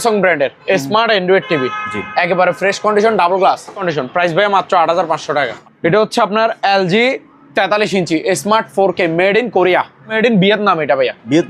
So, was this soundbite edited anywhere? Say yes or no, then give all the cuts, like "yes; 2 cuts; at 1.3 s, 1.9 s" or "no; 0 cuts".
yes; 3 cuts; at 3.9 s, 5.6 s, 10.2 s